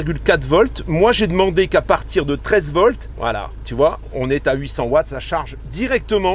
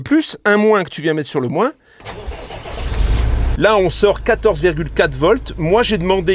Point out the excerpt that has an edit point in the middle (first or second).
second